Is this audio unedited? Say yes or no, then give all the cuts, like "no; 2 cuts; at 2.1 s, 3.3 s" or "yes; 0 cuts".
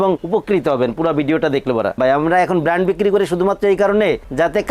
no; 1 cut; at 2.0 s